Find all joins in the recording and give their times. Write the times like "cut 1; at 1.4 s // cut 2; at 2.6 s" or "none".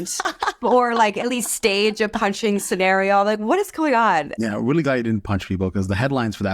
cut 1; at 4.3 s

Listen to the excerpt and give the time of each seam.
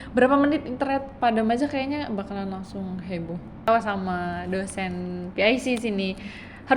cut 1; at 3.7 s

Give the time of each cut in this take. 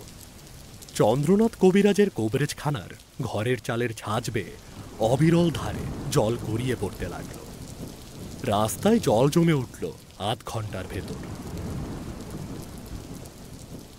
cut 1; at 7.2 s // cut 2; at 8.4 s // cut 3; at 11.1 s // cut 4; at 13.0 s

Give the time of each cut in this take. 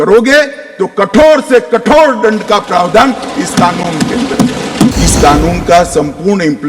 cut 1; at 5.0 s

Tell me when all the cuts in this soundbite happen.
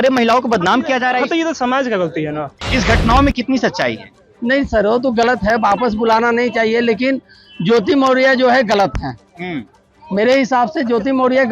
cut 1; at 2.6 s

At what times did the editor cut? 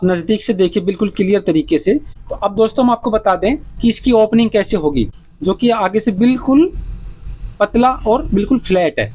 cut 1; at 2.2 s // cut 2; at 5.1 s

